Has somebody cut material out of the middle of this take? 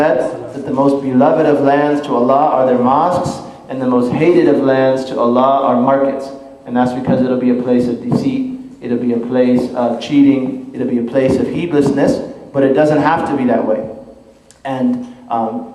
yes; 1 cut; at 5.2 s

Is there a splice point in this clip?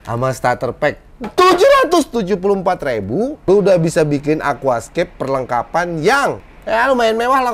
yes; 1 cut; at 3.4 s

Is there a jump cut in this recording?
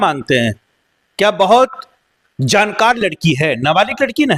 no; 0 cuts

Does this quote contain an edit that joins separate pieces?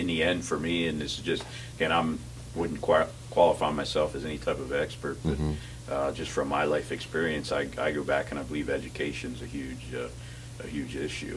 no; 0 cuts

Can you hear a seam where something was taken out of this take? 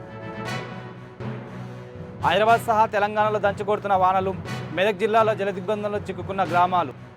yes; 1 cut; at 1.4 s

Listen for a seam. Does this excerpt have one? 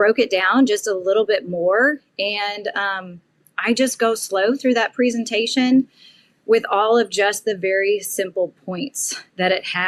no; 0 cuts

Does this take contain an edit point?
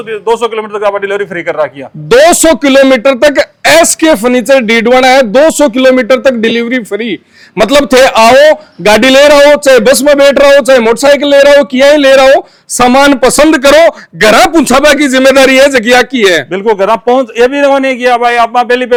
no; 0 cuts

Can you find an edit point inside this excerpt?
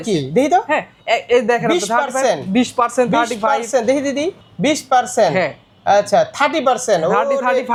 no; 0 cuts

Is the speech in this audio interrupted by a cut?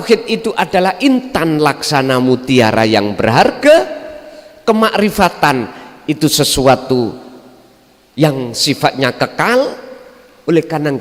no; 0 cuts

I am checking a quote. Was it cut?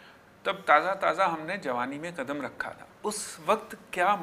yes; 1 cut; at 2.9 s

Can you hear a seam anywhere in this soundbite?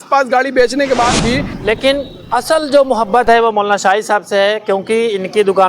yes; 1 cut; at 1.5 s

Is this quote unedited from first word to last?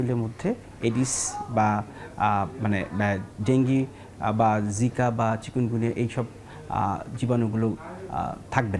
yes; 0 cuts

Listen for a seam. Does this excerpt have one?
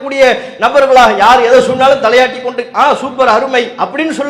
no; 0 cuts

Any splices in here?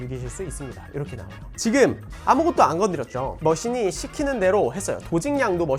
yes; 1 cut; at 1.4 s

